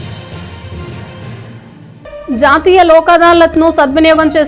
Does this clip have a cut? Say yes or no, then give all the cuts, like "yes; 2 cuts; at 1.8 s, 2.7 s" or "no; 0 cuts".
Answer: no; 0 cuts